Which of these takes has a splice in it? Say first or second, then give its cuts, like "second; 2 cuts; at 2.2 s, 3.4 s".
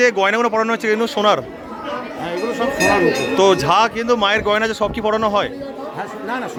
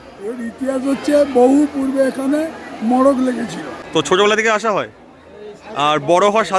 second; 1 cut; at 4.1 s